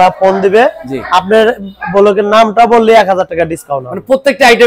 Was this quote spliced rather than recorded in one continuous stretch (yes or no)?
no